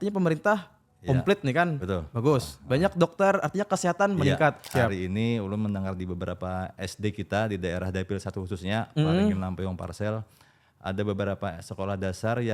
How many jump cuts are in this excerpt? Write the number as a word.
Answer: one